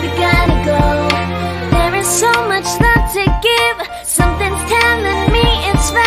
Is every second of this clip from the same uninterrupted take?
yes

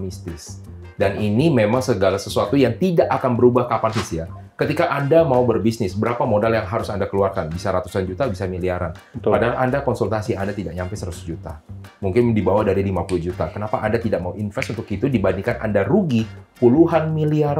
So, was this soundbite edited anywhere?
yes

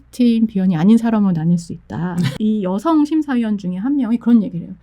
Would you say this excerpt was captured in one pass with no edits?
no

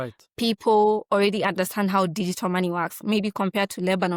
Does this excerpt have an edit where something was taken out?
no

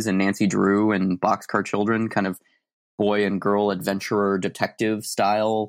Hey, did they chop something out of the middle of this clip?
no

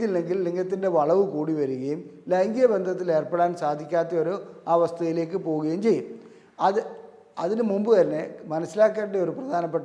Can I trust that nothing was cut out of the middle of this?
yes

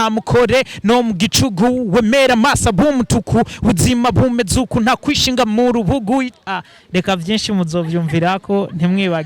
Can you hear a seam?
no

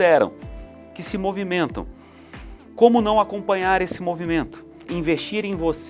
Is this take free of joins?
no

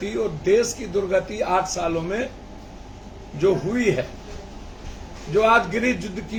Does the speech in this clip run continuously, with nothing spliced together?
yes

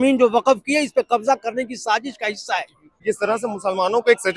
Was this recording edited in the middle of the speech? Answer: yes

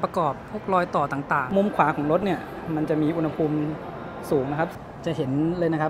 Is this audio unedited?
no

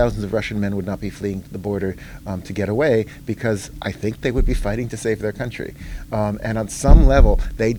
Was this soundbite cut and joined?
no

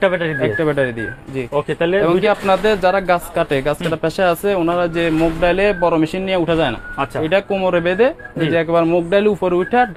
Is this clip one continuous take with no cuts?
yes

